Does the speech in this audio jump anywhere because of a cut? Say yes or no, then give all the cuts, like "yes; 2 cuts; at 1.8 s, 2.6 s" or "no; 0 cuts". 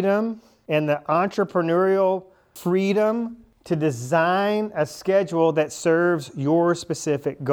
no; 0 cuts